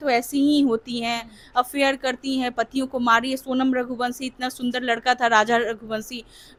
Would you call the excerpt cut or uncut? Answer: uncut